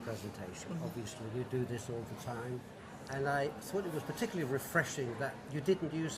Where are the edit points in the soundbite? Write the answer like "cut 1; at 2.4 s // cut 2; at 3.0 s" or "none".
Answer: cut 1; at 1.0 s